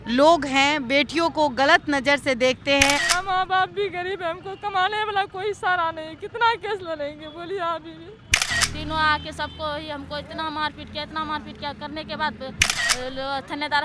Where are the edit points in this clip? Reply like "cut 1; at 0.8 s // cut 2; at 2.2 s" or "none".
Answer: cut 1; at 3.0 s // cut 2; at 8.5 s // cut 3; at 12.7 s